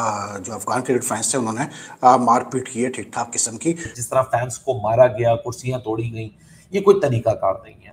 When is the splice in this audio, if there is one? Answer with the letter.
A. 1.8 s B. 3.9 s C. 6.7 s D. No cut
B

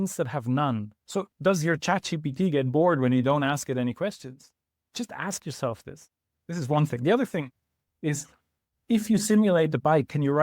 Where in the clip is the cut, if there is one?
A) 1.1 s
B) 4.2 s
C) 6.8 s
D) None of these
A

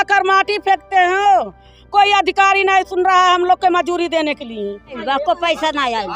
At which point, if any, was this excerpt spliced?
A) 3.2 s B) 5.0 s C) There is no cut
B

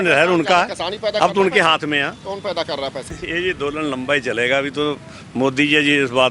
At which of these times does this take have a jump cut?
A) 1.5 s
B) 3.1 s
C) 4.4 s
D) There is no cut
B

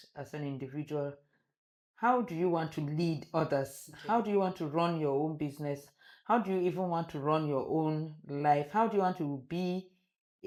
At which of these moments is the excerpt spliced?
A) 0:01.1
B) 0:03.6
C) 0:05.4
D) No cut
D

